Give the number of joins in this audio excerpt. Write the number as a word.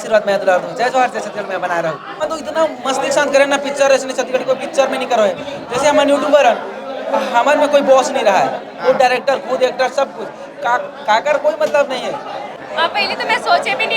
two